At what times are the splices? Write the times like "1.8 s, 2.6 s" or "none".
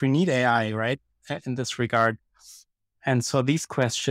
none